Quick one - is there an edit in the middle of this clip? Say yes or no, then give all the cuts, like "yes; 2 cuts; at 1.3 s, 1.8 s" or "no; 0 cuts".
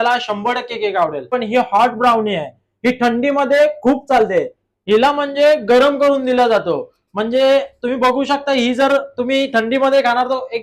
yes; 1 cut; at 1.3 s